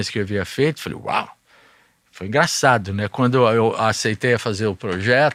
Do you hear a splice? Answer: no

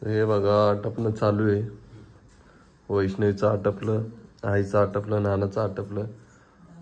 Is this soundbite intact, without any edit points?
yes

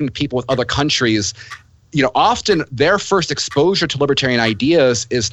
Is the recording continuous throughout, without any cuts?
yes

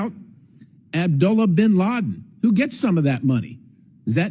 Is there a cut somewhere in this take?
no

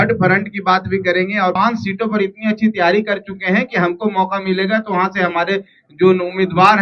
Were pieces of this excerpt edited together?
yes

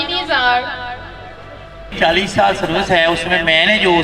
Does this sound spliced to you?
yes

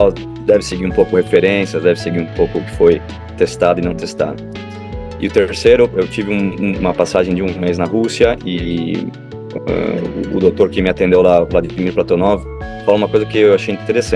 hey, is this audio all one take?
yes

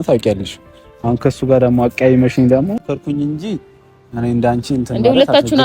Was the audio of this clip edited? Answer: yes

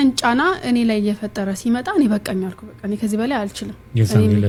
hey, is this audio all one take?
yes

